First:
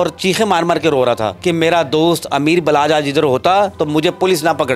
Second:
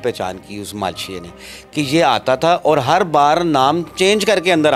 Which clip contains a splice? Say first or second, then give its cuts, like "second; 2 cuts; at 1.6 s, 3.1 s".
first; 2 cuts; at 1.3 s, 3.8 s